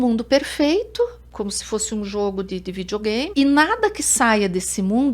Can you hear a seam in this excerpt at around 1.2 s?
yes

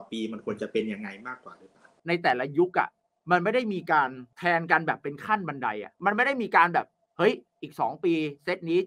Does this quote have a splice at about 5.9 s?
yes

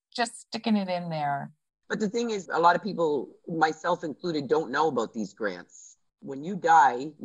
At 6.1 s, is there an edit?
yes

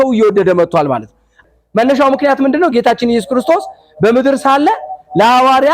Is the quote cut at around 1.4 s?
yes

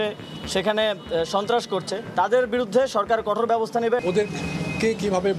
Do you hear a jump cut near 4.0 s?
yes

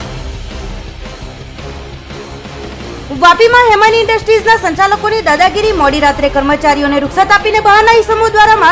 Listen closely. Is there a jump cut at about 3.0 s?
yes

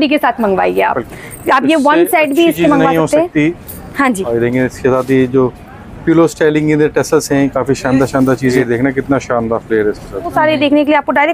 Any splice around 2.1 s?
no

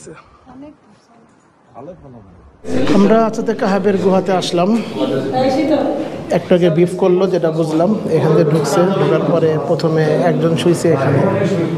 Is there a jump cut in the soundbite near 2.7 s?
yes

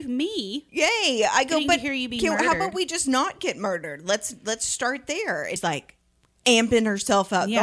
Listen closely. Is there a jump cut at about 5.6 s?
yes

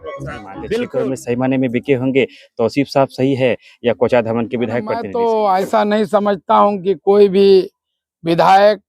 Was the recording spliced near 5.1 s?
yes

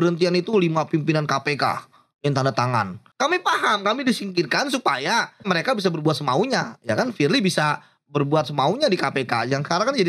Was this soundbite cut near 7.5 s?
no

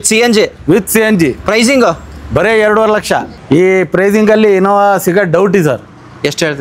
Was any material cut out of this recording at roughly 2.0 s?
no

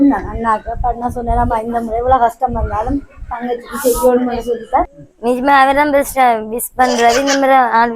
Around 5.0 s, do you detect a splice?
yes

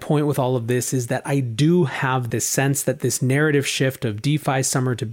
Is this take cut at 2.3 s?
yes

